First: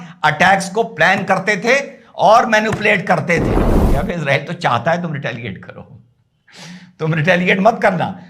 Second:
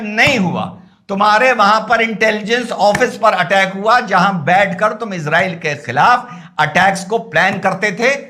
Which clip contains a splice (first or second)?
first